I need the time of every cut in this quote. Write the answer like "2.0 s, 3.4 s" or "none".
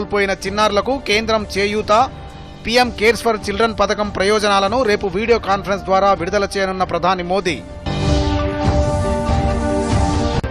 none